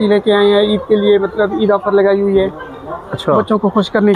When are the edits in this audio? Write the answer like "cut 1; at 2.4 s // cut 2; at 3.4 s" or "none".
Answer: none

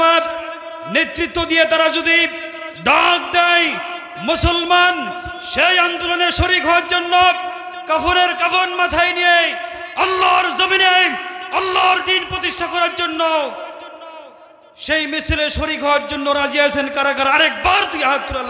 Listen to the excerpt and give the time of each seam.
none

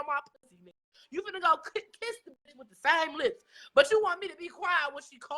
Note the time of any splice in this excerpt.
none

